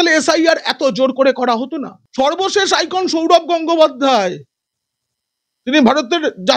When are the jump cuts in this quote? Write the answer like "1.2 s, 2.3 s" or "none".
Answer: 2.0 s

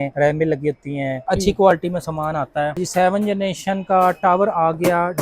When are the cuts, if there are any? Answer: 1.2 s, 2.7 s

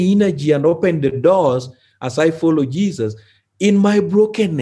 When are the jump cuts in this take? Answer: none

